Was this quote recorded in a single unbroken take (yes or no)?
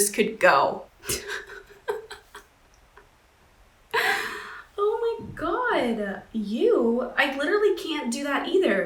yes